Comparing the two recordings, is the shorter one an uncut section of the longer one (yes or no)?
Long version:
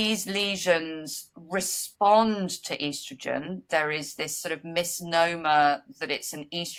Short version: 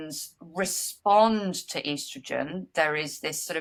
yes